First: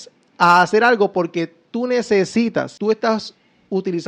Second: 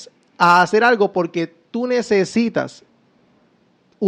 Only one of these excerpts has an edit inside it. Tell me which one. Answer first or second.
first